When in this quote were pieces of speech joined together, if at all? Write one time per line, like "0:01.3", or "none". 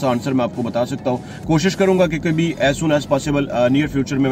none